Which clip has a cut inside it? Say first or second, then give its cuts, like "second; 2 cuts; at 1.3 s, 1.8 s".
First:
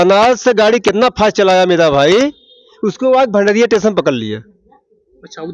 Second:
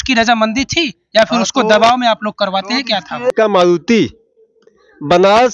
second; 1 cut; at 3.3 s